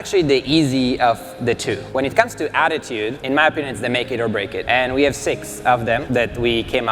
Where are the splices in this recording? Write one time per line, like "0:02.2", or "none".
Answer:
0:01.8
0:03.2
0:04.6
0:06.0